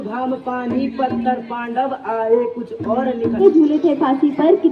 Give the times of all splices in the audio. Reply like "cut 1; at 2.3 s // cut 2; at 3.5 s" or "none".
cut 1; at 3.4 s